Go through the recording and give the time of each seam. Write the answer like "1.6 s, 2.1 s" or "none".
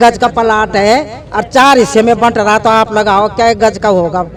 none